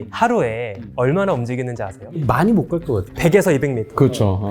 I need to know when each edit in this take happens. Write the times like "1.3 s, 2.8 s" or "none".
2.1 s

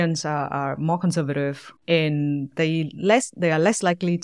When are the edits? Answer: none

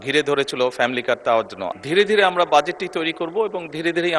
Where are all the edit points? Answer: 1.6 s

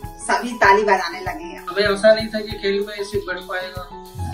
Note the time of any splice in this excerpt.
1.7 s

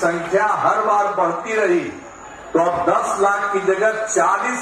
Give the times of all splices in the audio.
none

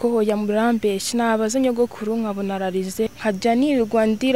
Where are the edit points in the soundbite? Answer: 3.1 s

